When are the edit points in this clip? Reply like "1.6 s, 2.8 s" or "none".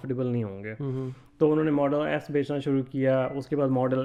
none